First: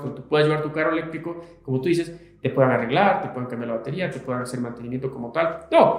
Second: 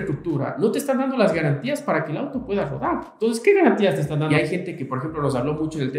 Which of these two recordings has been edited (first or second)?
second